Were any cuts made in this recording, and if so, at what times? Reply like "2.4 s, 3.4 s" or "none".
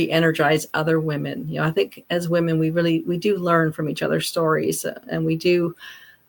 none